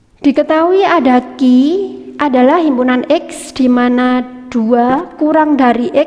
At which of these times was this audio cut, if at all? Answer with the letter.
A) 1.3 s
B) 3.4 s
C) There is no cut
C